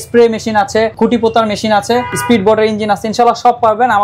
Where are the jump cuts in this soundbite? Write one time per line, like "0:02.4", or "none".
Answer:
0:00.9
0:02.1